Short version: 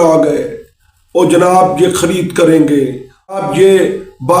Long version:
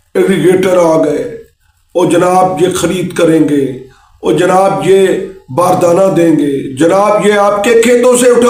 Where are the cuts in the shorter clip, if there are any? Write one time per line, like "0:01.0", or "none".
0:03.4